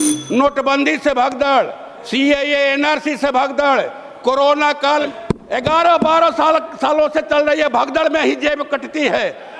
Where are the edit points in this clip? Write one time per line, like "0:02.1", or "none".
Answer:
0:05.0